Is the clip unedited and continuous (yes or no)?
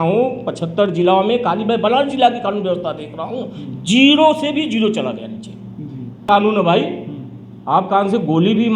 no